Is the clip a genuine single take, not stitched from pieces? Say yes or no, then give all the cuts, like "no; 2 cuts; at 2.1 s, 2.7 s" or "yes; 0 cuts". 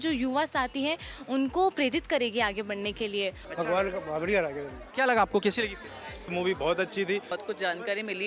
no; 2 cuts; at 3.4 s, 7.3 s